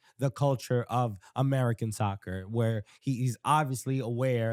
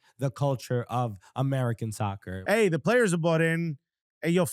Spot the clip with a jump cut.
second; 1 cut; at 2.3 s

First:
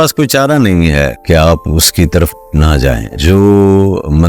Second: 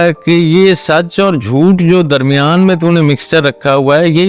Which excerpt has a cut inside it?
first; 1 cut; at 3.2 s

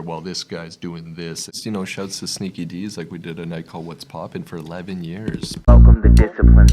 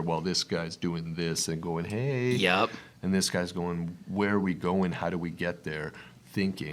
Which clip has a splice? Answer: first; 2 cuts; at 1.6 s, 5.7 s

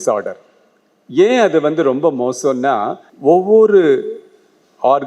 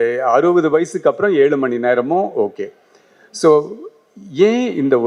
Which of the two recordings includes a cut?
first; 1 cut; at 3.0 s

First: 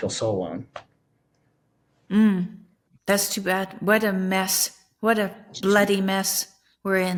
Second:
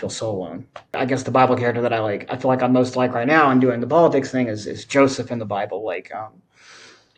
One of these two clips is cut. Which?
second; 1 cut; at 0.9 s

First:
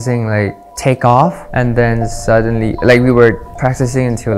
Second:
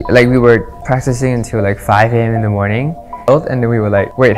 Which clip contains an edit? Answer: second; 1 cut; at 2.9 s

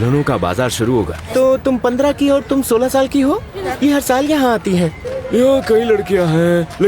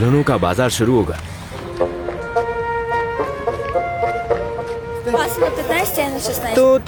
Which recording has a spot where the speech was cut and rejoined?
first; 3 cuts; at 1.2 s, 3.6 s, 5.1 s

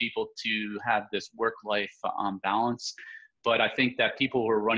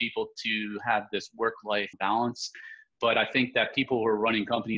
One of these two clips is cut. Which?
second; 1 cut; at 1.9 s

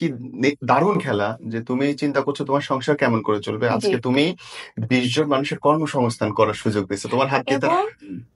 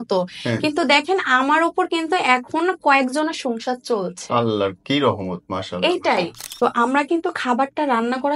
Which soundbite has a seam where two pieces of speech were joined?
second; 1 cut; at 6.5 s

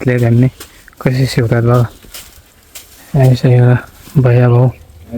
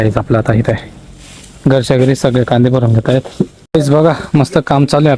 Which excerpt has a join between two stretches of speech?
second; 1 cut; at 3.6 s

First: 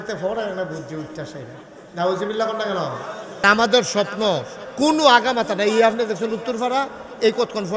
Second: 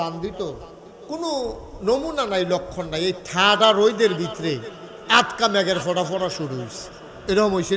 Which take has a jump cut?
first; 1 cut; at 3.4 s

